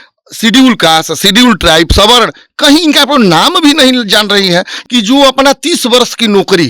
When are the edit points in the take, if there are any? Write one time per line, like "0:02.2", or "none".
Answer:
0:04.7